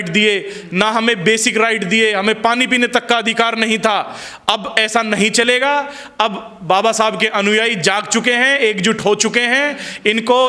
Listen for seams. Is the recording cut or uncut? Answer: uncut